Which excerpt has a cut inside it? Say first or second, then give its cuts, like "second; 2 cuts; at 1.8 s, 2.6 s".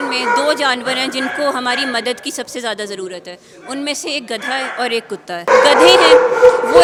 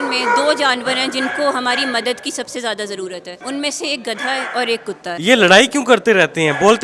second; 2 cuts; at 3.3 s, 5.1 s